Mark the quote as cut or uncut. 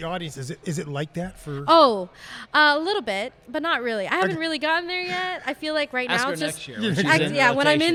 uncut